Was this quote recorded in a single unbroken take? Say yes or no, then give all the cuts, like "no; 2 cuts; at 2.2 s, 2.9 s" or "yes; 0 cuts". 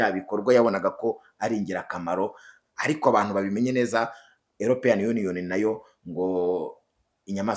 yes; 0 cuts